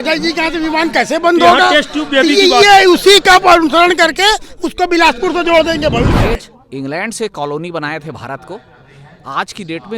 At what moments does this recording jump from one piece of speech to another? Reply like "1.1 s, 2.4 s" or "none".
6.1 s